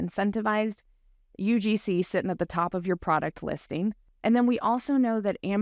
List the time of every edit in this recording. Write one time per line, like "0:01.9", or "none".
0:04.1